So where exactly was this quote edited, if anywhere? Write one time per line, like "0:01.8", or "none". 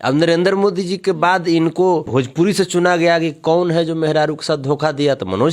0:02.1